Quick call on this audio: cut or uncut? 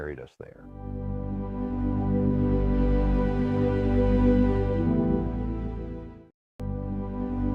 cut